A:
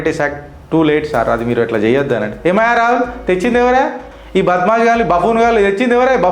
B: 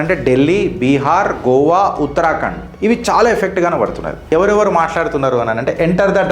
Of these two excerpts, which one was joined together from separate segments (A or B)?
B